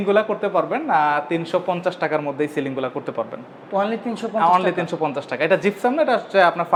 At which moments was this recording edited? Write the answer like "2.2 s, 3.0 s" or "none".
none